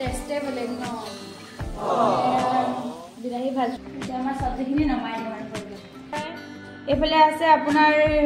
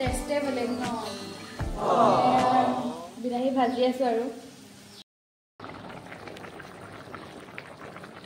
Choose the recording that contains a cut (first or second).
first